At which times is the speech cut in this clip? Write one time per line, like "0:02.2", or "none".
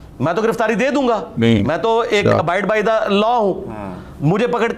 none